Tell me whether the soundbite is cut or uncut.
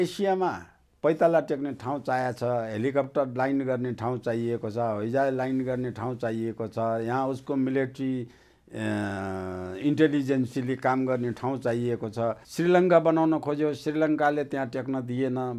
cut